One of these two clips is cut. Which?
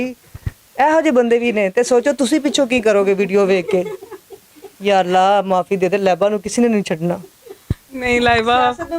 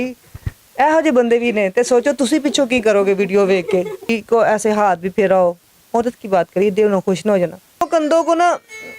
second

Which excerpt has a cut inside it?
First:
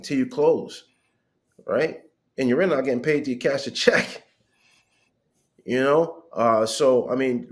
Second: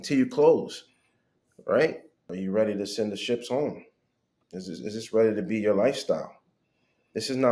second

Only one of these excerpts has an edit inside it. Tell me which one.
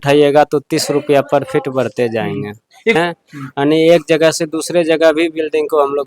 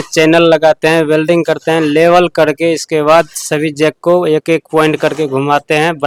first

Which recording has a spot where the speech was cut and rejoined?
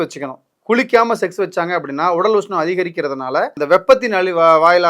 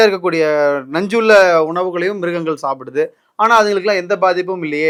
first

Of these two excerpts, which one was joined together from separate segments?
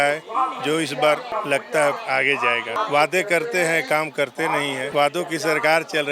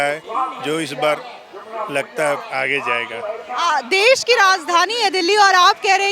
first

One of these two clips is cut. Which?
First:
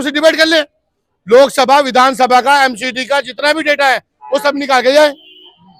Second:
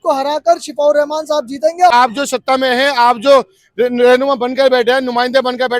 second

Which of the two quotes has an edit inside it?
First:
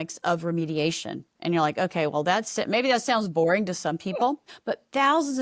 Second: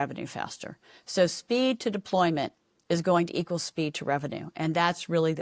first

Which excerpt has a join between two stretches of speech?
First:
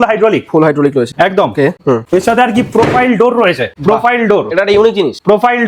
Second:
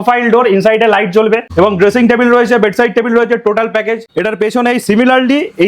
second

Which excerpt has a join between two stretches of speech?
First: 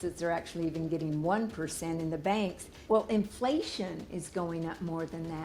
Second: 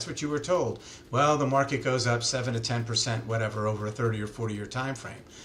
first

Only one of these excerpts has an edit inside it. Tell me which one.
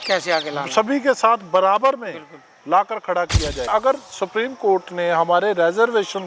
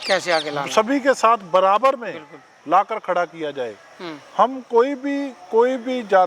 first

